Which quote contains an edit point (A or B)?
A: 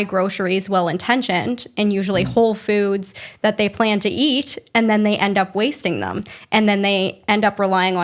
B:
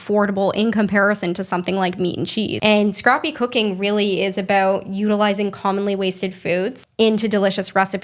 B